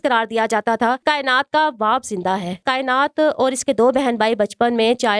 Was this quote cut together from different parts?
yes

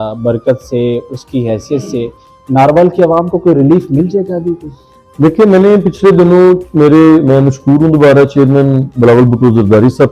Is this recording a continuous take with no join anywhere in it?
yes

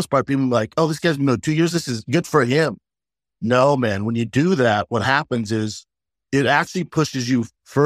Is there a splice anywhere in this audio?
no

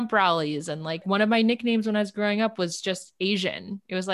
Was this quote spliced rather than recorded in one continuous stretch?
yes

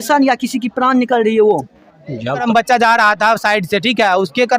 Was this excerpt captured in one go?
no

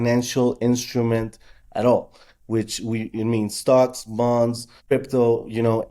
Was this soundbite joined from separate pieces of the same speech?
yes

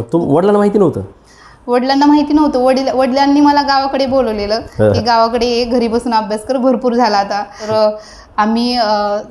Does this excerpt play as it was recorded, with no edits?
no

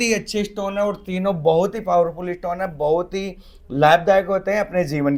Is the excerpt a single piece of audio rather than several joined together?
yes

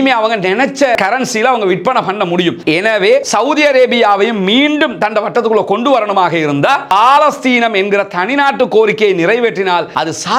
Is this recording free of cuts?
yes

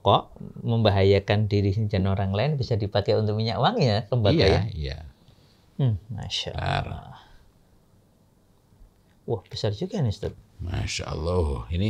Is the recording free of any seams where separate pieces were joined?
yes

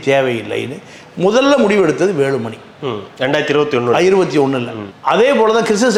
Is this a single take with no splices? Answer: yes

